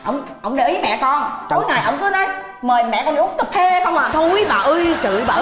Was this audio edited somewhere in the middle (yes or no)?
no